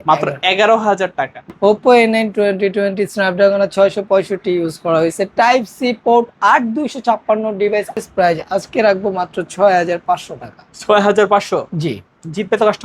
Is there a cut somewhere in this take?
yes; 2 cuts; at 1.5 s, 8.0 s

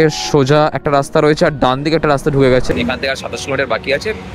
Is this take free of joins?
no; 1 cut; at 2.7 s

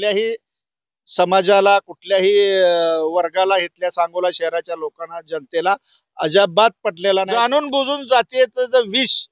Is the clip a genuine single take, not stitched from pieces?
no; 1 cut; at 7.3 s

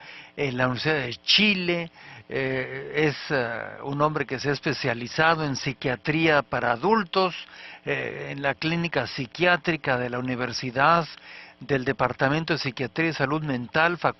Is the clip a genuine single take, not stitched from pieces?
yes; 0 cuts

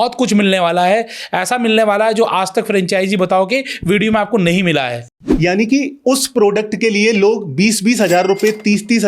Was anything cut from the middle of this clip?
yes; 1 cut; at 5.0 s

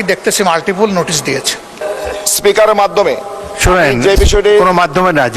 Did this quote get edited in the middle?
yes; 1 cut; at 1.8 s

